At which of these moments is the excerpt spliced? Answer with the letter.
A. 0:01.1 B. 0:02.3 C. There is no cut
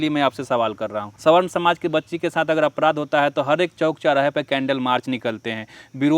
A